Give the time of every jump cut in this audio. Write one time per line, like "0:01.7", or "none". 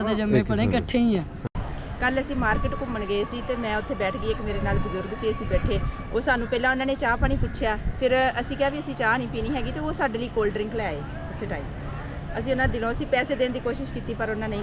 0:01.4

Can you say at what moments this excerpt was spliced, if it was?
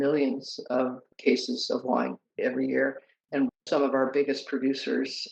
none

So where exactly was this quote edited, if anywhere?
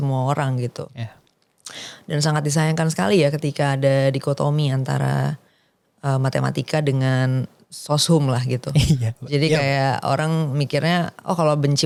none

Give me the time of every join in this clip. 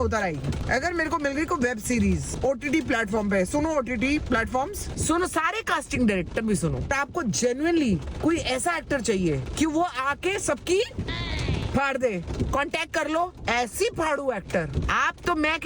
0:04.9
0:06.9
0:12.3
0:14.7

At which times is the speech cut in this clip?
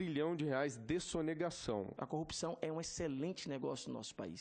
0:01.9

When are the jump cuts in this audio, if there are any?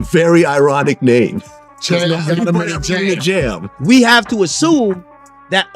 0:03.7

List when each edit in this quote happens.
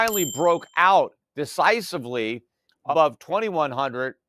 0:02.9

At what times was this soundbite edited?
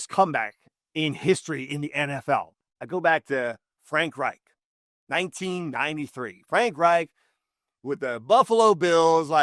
0:02.6

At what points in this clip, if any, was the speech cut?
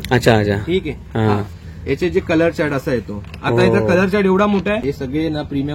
0:04.7

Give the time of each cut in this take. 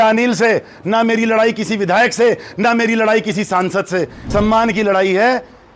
0:04.2

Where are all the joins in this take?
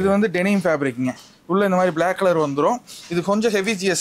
none

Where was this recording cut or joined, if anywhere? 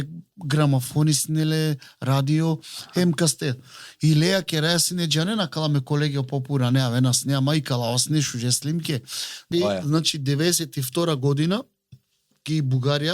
0:09.5

